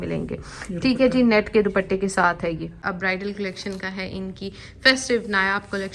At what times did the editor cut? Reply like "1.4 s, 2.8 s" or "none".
2.9 s